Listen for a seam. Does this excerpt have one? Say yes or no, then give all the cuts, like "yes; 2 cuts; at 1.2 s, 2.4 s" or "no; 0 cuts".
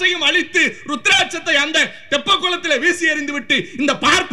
no; 0 cuts